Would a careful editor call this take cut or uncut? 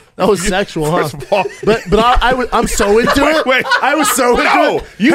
uncut